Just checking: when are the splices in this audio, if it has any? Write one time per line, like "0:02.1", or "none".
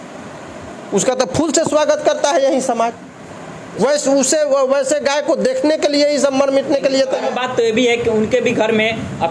none

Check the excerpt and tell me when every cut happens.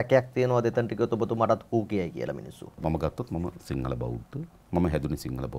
0:02.8
0:04.6

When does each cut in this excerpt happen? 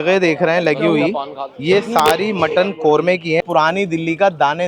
0:03.5

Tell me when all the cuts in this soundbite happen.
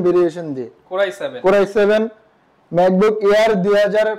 none

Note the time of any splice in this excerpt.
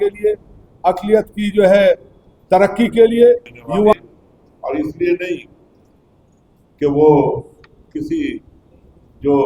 0:03.9

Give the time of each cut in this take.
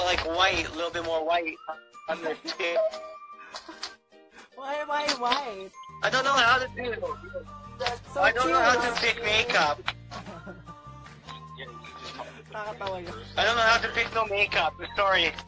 none

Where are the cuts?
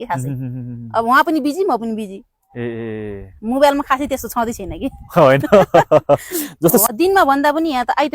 0:06.8

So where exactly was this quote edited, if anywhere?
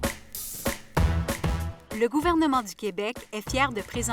0:01.7

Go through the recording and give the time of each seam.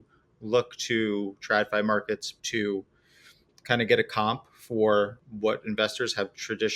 0:02.3
0:05.2

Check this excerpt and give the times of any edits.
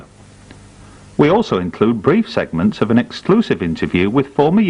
0:01.6

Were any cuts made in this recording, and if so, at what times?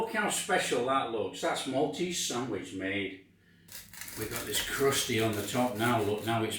none

